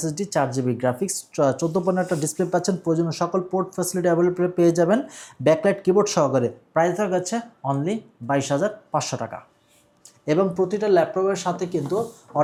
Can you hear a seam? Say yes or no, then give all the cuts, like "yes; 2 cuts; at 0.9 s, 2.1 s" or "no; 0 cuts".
no; 0 cuts